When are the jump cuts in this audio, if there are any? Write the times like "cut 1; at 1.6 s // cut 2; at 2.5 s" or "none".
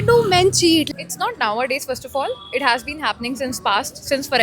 cut 1; at 0.9 s